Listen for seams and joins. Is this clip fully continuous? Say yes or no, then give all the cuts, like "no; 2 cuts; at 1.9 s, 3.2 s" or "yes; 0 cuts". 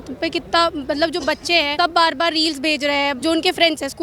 no; 2 cuts; at 1.7 s, 3.2 s